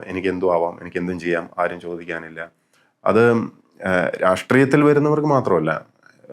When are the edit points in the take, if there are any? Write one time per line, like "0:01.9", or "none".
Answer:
none